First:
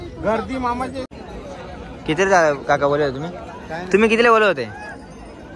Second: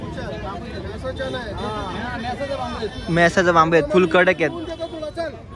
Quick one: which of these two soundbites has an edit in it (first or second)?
first